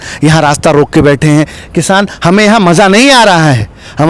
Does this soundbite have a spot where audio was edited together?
no; 0 cuts

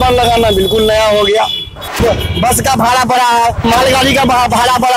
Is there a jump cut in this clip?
yes; 2 cuts; at 2.0 s, 3.6 s

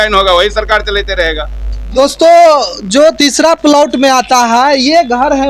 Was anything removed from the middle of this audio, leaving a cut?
no; 0 cuts

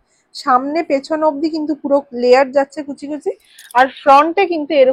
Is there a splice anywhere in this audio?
no; 0 cuts

